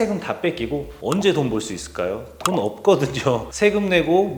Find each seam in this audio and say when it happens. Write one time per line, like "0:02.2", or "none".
0:00.9
0:03.5

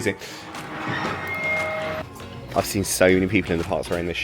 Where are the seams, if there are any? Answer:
0:02.0

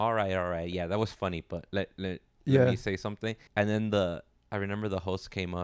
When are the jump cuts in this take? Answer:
0:03.4

